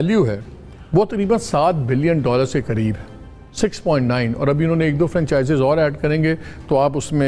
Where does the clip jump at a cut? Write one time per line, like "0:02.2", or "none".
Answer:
none